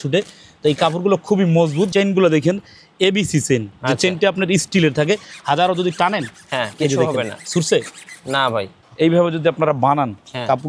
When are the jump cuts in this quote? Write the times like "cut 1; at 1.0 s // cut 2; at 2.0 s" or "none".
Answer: cut 1; at 1.9 s // cut 2; at 8.8 s